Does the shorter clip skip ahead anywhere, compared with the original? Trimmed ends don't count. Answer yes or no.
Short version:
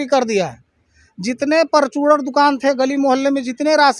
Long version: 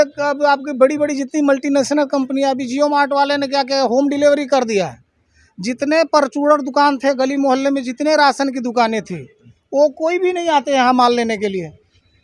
no